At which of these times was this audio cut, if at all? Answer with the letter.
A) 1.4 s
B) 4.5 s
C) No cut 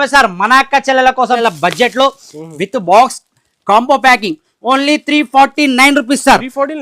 A